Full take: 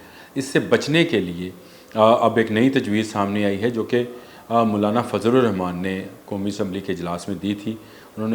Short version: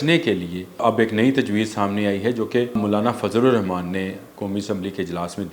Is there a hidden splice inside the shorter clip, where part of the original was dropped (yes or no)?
yes